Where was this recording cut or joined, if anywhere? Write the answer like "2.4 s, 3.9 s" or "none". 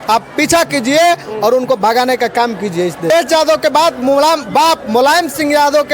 3.1 s